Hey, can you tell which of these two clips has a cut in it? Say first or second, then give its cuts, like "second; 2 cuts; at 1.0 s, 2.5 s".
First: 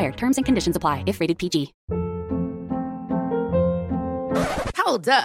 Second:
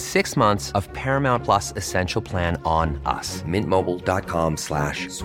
first; 1 cut; at 1.8 s